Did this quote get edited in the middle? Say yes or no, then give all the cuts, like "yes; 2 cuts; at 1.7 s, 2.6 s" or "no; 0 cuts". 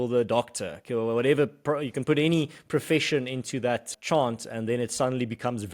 yes; 1 cut; at 3.9 s